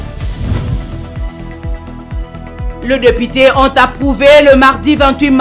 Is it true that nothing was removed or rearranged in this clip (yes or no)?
yes